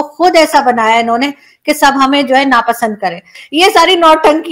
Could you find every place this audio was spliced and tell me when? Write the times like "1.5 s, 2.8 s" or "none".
3.3 s